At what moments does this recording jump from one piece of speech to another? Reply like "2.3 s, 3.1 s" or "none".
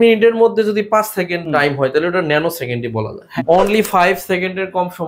1.4 s, 3.4 s